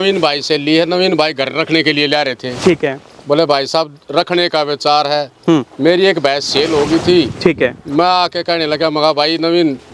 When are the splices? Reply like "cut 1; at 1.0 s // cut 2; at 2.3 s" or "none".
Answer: none